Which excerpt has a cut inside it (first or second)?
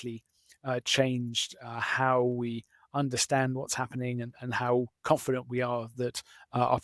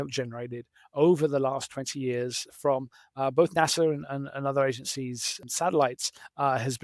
second